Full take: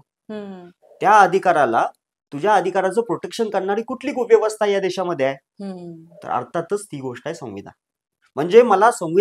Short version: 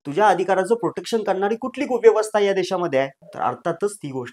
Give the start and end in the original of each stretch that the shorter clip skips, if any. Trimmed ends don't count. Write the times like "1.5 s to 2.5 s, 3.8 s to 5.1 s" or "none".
5.5 s to 6.1 s